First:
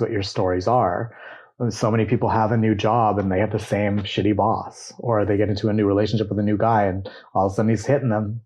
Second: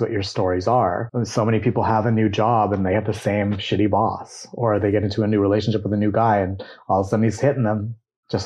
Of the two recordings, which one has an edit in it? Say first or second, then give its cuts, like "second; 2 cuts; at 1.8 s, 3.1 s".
second; 1 cut; at 1.1 s